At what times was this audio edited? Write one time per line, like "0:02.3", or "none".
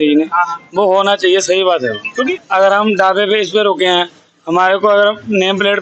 0:02.3